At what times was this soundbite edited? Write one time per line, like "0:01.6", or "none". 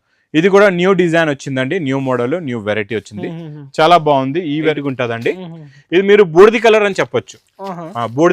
0:04.8